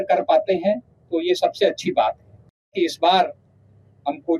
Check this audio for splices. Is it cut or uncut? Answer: cut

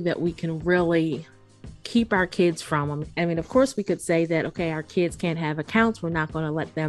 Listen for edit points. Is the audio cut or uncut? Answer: cut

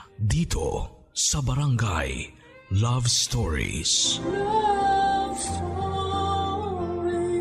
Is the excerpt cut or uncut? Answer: uncut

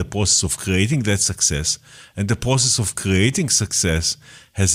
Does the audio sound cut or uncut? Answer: uncut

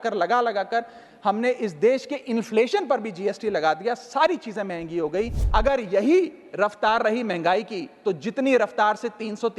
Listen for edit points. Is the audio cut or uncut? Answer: cut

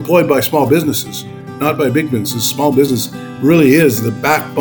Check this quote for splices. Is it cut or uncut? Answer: uncut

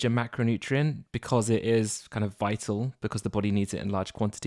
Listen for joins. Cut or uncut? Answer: uncut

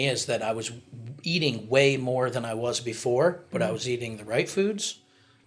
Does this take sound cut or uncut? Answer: uncut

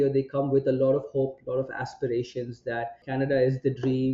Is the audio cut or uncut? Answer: cut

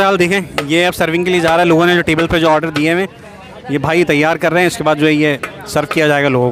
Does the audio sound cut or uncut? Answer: uncut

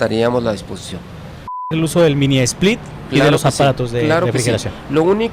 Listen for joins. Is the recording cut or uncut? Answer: cut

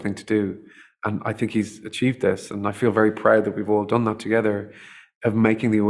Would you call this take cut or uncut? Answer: uncut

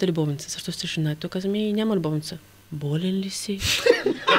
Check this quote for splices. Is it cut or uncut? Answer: uncut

